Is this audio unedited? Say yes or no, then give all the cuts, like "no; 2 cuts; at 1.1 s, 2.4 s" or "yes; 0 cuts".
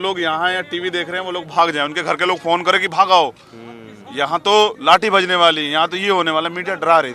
yes; 0 cuts